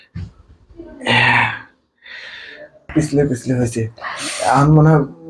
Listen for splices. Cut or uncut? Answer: cut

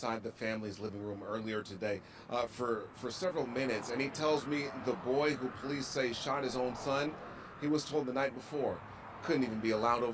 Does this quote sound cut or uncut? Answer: cut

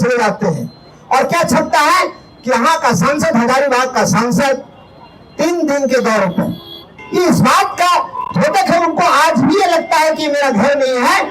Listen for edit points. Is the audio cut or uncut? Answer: uncut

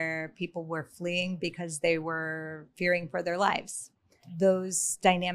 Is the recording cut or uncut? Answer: cut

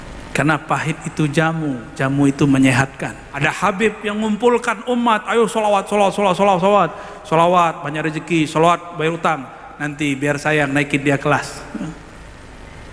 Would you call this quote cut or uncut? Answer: cut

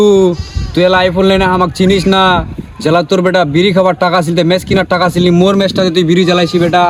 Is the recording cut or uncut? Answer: uncut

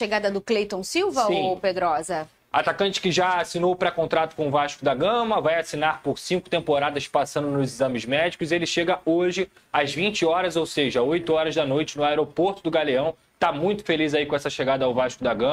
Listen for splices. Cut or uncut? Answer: uncut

